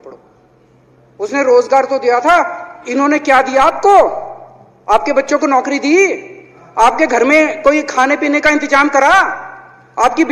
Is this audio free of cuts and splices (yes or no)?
yes